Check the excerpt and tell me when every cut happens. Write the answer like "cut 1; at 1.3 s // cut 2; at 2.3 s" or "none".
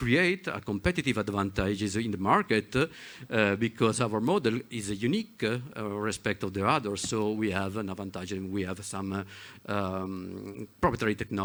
none